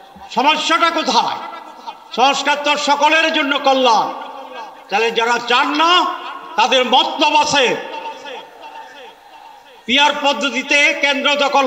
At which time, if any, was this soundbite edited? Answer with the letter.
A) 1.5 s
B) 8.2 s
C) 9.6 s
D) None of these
D